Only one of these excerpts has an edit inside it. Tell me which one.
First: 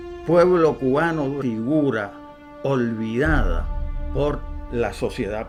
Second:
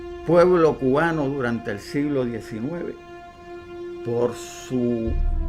second; 1 cut; at 1.4 s

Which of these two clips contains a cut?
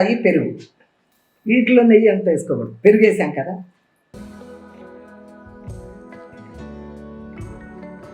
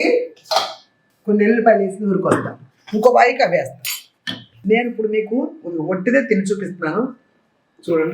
second; 1 cut; at 4.5 s

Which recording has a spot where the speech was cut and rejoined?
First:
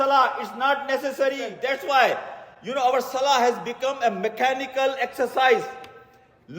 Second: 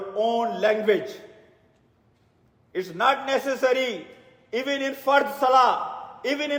first; 1 cut; at 1.5 s

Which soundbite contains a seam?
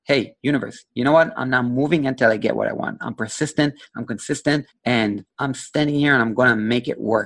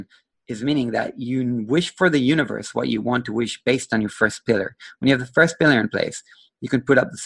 first; 2 cuts; at 4.7 s, 5.3 s

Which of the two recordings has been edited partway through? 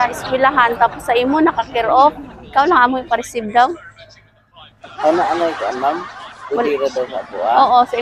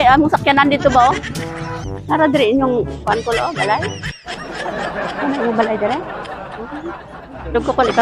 second; 2 cuts; at 3.9 s, 5.2 s

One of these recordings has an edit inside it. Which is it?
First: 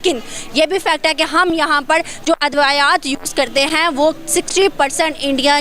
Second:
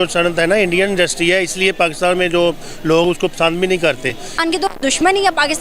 second; 1 cut; at 4.4 s

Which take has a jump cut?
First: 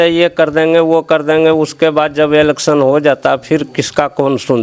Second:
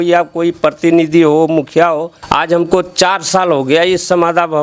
second; 1 cut; at 2.1 s

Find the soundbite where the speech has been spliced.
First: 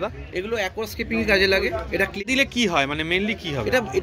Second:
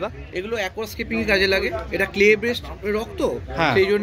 first; 1 cut; at 2.2 s

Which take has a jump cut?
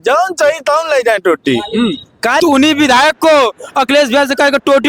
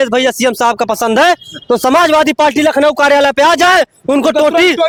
first; 1 cut; at 2.4 s

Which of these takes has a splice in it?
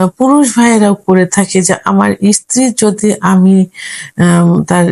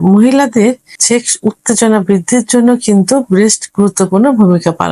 second; 1 cut; at 0.9 s

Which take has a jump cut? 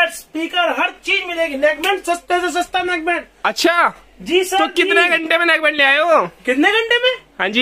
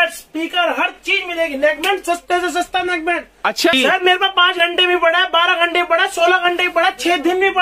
second; 1 cut; at 3.7 s

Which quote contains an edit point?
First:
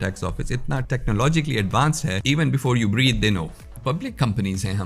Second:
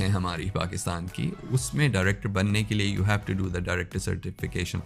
first; 3 cuts; at 0.8 s, 2.2 s, 3.7 s

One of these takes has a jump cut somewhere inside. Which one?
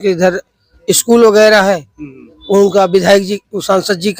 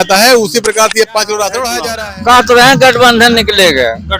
second; 1 cut; at 1.9 s

